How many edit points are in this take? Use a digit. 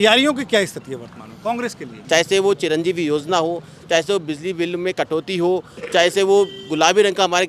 1